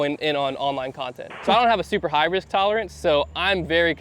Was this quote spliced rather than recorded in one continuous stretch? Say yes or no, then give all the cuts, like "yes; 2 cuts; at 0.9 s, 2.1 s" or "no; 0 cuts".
yes; 1 cut; at 1.4 s